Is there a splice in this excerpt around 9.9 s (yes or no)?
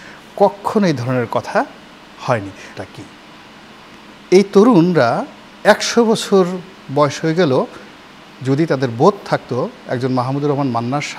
no